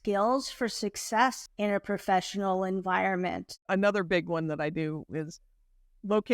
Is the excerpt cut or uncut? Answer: cut